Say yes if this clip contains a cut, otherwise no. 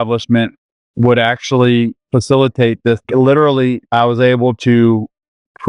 yes